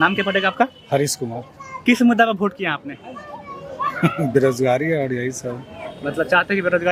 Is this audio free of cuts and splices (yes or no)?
yes